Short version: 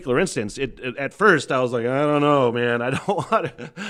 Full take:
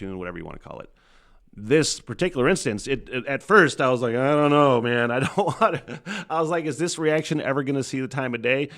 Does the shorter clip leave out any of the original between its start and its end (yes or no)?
no